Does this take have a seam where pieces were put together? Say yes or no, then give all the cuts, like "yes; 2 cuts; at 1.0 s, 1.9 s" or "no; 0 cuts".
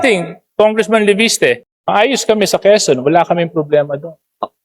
yes; 1 cut; at 1.7 s